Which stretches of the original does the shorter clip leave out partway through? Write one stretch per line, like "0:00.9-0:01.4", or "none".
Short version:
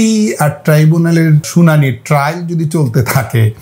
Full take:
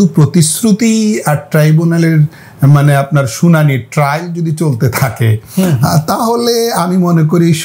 0:02.3-0:03.3